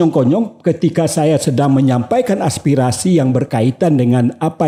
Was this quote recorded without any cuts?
yes; 0 cuts

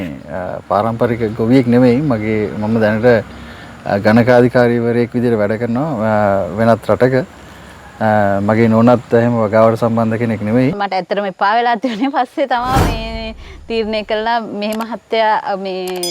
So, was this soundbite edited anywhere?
yes; 1 cut; at 10.8 s

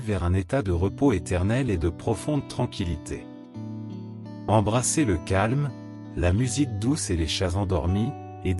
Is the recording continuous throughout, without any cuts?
no; 2 cuts; at 3.2 s, 4.5 s

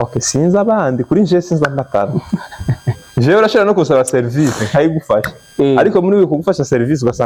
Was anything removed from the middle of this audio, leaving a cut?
no; 0 cuts

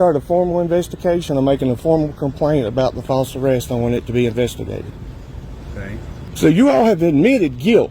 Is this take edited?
yes; 1 cut; at 6.3 s

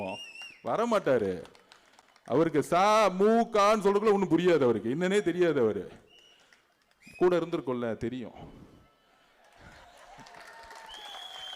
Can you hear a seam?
no; 0 cuts

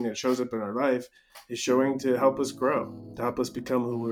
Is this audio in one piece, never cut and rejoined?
no; 1 cut; at 3.0 s

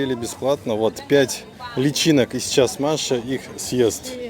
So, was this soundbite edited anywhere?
no; 0 cuts

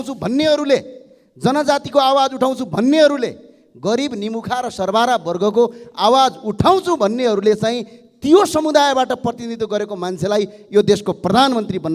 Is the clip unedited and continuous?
yes; 0 cuts

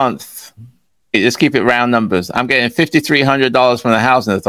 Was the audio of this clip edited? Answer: yes; 1 cut; at 1.1 s

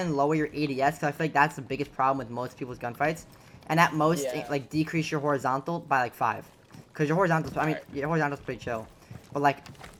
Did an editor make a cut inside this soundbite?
no; 0 cuts

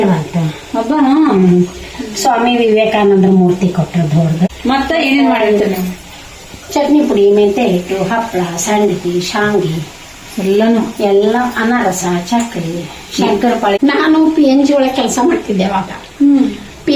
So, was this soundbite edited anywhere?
yes; 2 cuts; at 4.6 s, 13.8 s

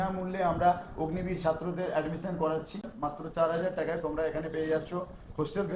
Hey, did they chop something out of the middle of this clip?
yes; 1 cut; at 2.8 s

